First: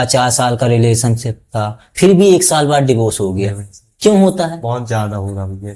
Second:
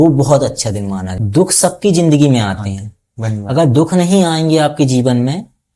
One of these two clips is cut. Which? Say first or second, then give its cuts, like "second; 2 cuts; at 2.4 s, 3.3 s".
second; 1 cut; at 1.2 s